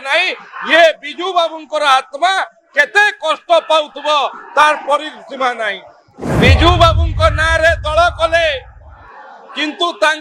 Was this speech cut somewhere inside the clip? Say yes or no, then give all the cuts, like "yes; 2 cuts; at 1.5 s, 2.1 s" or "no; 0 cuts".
yes; 1 cut; at 6.2 s